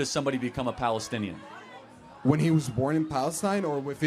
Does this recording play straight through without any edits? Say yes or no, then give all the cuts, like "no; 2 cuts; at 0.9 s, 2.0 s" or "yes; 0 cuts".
yes; 0 cuts